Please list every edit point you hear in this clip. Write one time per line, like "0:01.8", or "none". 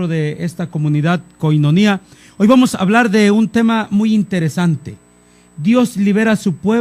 0:02.7